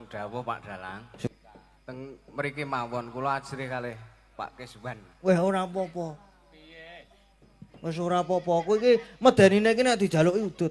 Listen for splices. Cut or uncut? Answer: cut